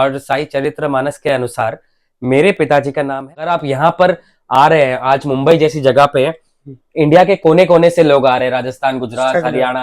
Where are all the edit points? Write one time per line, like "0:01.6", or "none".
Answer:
0:03.3